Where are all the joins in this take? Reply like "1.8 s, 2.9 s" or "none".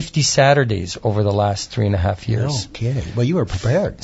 none